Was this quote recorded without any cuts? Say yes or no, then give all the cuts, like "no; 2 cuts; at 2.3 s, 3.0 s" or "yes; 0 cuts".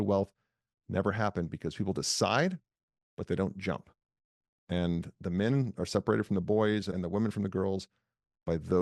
no; 1 cut; at 6.9 s